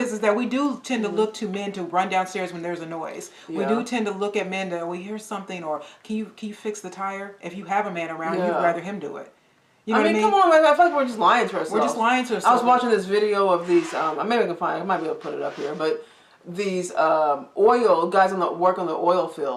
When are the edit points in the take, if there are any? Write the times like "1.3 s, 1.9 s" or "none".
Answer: none